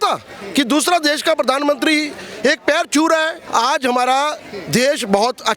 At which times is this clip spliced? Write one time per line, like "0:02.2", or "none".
0:03.4